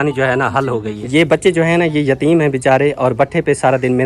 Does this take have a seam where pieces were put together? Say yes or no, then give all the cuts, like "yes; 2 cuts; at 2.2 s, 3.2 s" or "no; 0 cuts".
yes; 1 cut; at 0.9 s